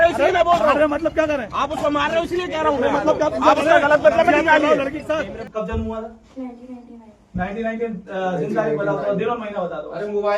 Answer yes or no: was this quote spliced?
yes